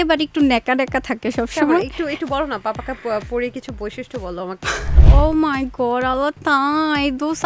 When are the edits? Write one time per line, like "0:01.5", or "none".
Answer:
0:05.0